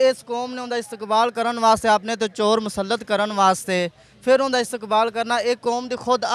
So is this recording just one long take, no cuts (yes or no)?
yes